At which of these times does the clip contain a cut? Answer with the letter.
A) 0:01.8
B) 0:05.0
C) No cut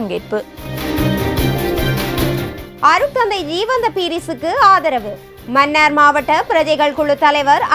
C